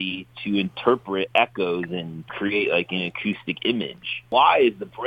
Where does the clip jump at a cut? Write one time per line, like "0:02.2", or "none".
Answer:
0:02.3
0:04.1

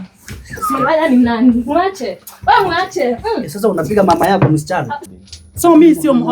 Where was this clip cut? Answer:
0:05.0

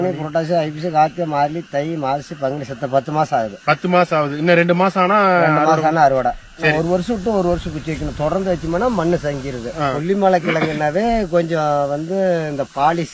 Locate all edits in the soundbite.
0:06.7
0:09.9

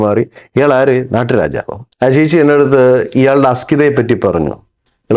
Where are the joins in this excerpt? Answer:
0:01.8

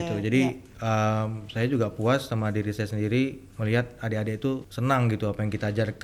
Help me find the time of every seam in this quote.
0:04.7

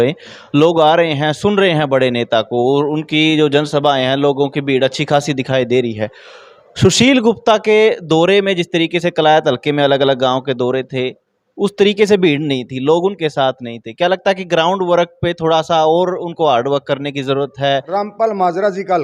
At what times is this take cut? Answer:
0:17.9

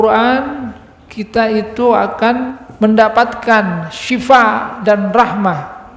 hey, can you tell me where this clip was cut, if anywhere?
0:02.6

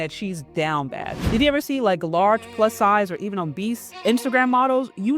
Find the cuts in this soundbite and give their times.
0:01.3
0:03.9

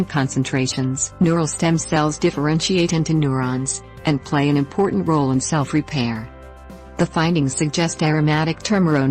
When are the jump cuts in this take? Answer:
0:01.0

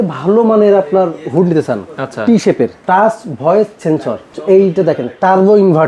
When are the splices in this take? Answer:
0:02.8
0:04.4

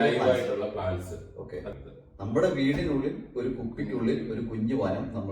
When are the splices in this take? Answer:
0:01.7

